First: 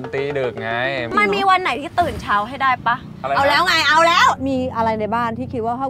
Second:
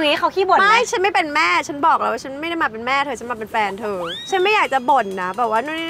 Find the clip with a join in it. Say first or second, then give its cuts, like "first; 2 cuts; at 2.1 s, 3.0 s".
first; 2 cuts; at 1.1 s, 4.4 s